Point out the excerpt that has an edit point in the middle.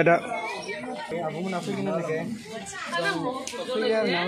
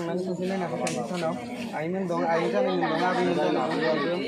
first; 1 cut; at 1.1 s

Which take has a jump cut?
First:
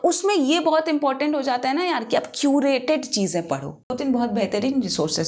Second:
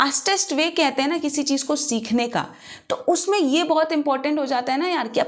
first; 1 cut; at 4.0 s

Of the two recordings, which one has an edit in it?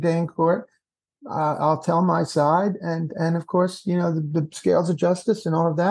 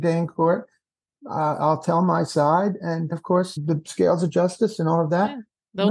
second; 1 cut; at 3.5 s

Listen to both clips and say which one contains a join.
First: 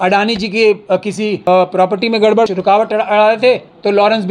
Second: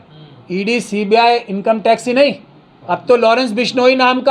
first; 2 cuts; at 1.4 s, 2.5 s

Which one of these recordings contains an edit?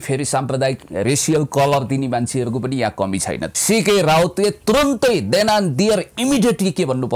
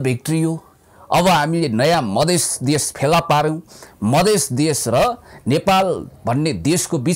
first; 1 cut; at 3.5 s

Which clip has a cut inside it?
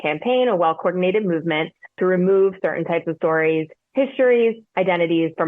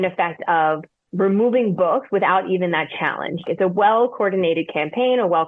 second; 1 cut; at 3.5 s

